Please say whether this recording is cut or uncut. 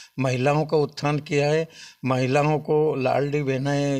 uncut